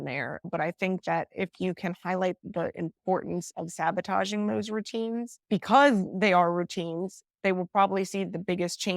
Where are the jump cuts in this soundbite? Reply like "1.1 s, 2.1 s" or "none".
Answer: 2.4 s